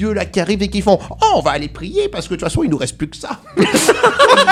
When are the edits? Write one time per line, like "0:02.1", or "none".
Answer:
none